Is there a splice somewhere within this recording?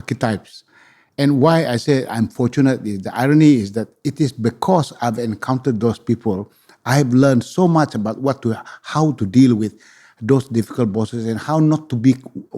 no; 0 cuts

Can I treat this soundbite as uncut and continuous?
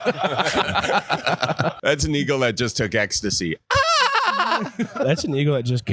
no; 2 cuts; at 1.8 s, 4.9 s

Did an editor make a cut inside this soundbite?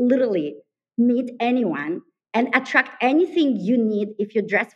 no; 0 cuts

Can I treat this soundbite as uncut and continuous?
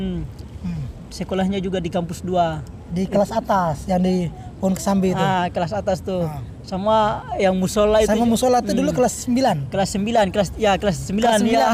yes; 0 cuts

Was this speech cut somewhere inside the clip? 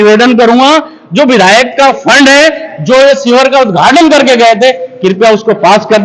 no; 0 cuts

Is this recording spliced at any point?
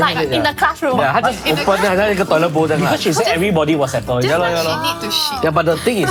no; 0 cuts

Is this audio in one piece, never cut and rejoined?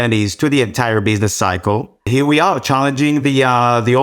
no; 1 cut; at 2.1 s

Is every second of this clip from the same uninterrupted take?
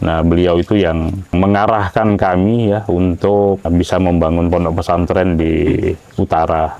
no; 2 cuts; at 1.3 s, 3.7 s

